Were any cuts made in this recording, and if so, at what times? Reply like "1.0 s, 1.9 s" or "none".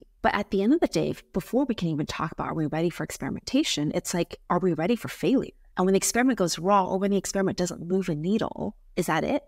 none

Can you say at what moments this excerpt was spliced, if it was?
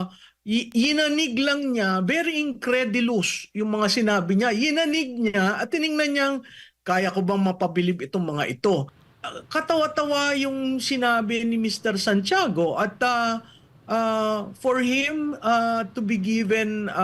9.0 s

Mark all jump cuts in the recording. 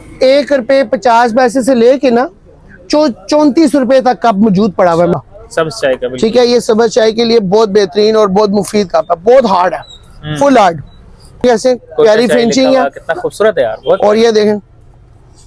5.1 s, 11.4 s

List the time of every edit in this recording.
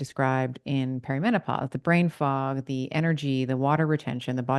none

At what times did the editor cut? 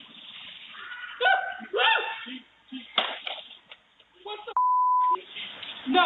none

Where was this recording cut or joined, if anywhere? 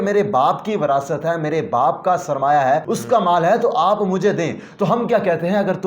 2.9 s

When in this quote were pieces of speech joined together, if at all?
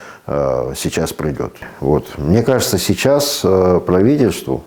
1.7 s

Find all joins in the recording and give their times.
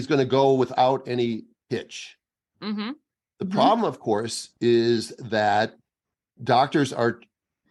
6.3 s

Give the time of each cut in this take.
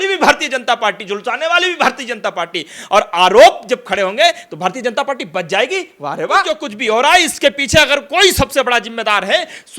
6.7 s

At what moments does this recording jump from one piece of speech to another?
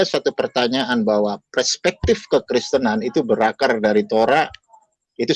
none

